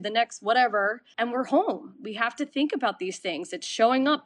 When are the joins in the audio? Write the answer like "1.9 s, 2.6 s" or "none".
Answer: 1.0 s